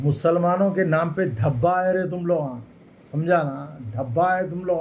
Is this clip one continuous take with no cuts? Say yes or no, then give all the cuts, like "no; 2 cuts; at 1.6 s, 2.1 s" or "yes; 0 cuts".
yes; 0 cuts